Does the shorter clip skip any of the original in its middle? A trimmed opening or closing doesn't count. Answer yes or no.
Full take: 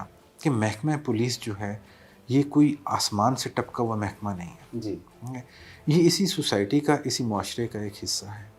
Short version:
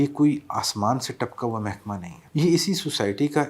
yes